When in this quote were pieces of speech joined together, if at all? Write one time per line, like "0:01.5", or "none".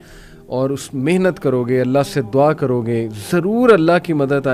none